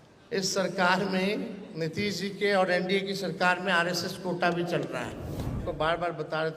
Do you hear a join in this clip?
yes; 1 cut; at 5.6 s

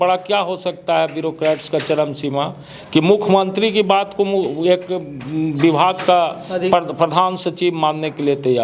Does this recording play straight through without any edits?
yes; 0 cuts

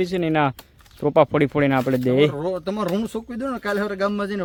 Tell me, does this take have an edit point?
no; 0 cuts

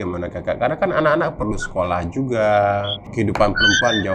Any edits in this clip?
yes; 1 cut; at 3.0 s

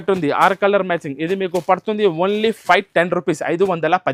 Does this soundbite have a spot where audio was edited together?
no; 0 cuts

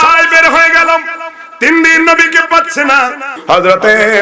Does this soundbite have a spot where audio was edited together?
yes; 1 cut; at 3.3 s

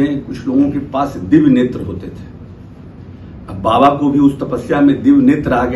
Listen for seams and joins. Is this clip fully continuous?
yes; 0 cuts

